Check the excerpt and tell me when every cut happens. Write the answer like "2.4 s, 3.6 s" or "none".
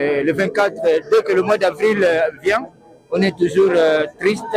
none